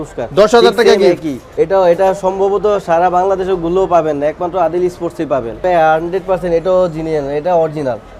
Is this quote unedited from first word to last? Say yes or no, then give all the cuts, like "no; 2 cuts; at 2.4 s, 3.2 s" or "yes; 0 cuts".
no; 2 cuts; at 1.4 s, 5.6 s